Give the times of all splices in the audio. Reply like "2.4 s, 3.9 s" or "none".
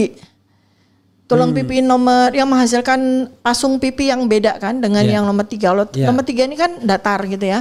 none